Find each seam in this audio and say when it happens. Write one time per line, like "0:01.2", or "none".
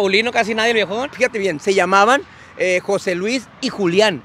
0:01.1